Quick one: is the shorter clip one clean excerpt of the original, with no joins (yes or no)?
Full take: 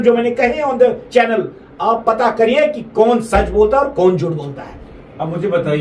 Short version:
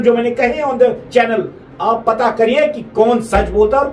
yes